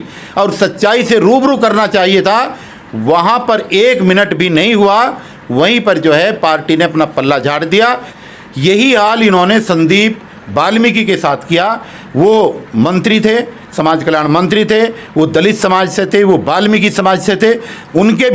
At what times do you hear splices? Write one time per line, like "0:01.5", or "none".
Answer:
0:08.1